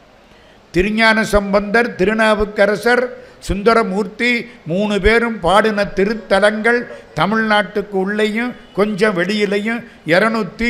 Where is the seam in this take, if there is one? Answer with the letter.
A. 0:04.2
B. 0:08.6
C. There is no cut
C